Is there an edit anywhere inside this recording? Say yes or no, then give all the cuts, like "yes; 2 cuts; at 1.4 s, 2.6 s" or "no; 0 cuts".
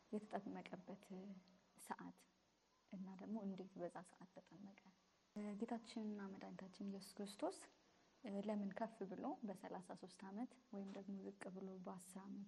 yes; 1 cut; at 5.4 s